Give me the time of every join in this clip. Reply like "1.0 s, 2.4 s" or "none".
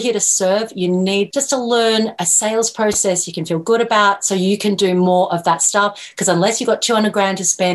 1.3 s, 2.1 s